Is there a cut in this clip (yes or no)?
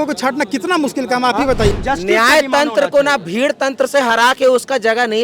yes